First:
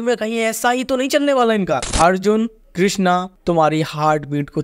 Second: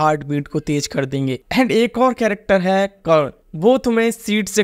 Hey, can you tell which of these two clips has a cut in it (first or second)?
first